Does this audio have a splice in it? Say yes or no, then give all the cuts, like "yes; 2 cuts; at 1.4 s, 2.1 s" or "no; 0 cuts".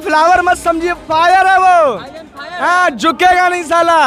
no; 0 cuts